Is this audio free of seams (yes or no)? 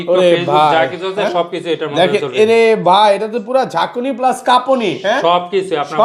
yes